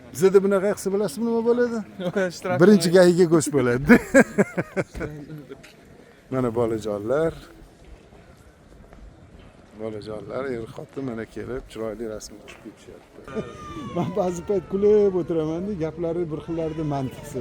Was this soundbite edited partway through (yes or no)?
yes